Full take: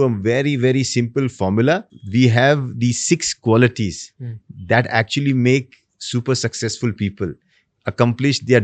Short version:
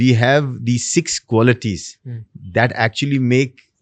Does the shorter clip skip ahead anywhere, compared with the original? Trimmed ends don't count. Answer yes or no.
no